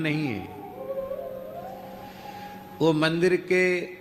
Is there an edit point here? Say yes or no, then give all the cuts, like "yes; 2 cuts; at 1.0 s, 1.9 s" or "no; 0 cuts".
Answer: no; 0 cuts